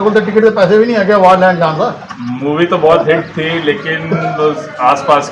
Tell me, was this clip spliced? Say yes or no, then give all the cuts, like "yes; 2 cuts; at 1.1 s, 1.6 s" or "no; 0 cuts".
no; 0 cuts